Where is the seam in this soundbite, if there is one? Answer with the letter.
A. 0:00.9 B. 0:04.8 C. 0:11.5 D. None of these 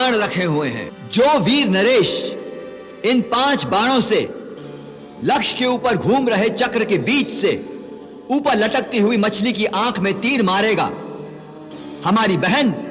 A